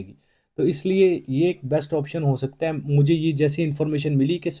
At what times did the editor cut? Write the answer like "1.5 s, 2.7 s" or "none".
none